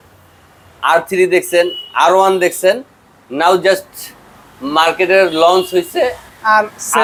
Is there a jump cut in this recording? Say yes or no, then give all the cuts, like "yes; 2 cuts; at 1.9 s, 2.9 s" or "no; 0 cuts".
no; 0 cuts